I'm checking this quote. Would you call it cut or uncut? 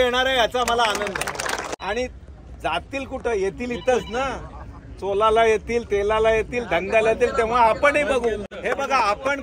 cut